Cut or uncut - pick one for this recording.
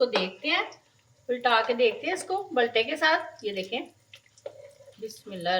uncut